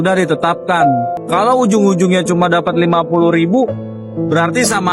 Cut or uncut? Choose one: cut